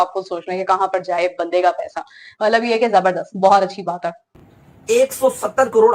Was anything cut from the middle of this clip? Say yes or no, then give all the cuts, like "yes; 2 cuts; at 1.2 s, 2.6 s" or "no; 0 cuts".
yes; 1 cut; at 4.2 s